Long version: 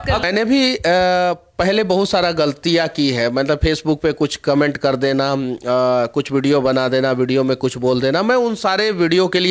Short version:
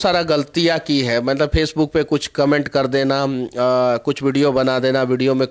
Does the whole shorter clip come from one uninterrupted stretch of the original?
yes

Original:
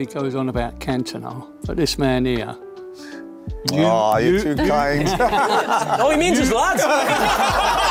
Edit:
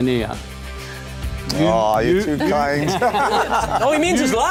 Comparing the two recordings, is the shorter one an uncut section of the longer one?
yes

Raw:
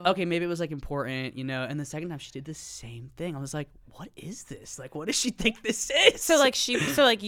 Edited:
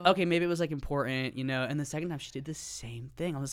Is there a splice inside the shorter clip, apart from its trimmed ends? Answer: no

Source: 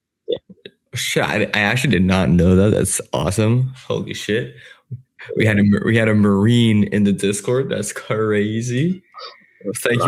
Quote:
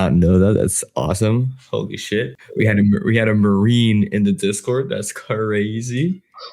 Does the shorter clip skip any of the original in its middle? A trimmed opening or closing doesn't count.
yes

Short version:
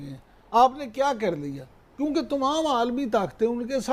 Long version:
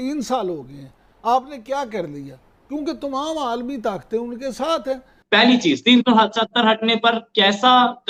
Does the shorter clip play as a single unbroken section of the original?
yes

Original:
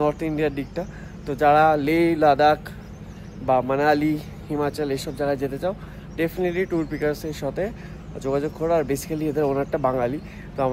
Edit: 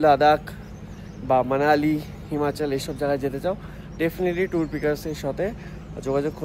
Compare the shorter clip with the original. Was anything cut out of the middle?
no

